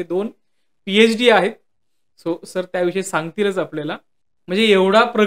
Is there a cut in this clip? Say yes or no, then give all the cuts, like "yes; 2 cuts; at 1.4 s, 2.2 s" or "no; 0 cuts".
no; 0 cuts